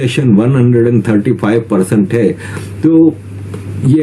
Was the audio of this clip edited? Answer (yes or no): no